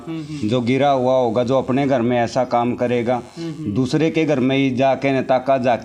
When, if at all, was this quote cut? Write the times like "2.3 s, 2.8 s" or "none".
none